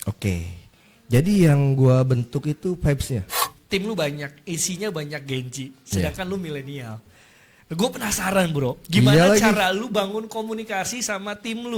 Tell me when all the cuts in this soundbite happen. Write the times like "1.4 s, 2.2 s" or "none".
3.5 s